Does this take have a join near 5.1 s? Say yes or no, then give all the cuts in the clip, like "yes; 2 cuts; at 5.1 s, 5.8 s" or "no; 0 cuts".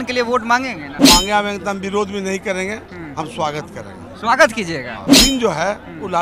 yes; 2 cuts; at 0.9 s, 5.1 s